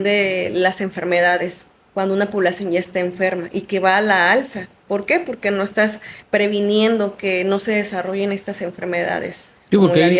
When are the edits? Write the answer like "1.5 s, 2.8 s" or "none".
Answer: none